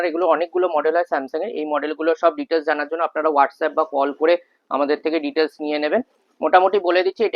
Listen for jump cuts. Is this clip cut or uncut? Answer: uncut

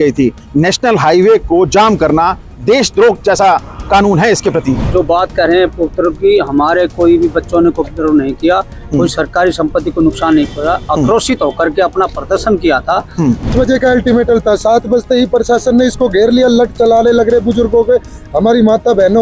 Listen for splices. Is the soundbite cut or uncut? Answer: cut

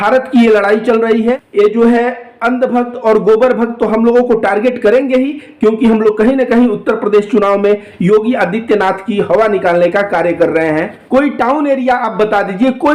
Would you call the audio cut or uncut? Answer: cut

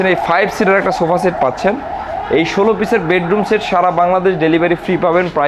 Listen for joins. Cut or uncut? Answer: uncut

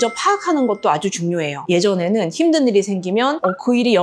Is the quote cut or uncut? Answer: cut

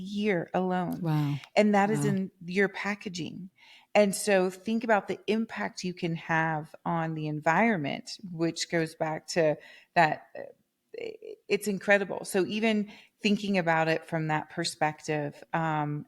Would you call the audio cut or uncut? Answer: uncut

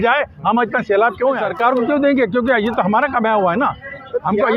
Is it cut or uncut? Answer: cut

